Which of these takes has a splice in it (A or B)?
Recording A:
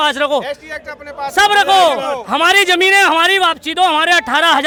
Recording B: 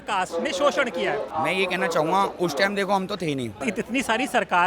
B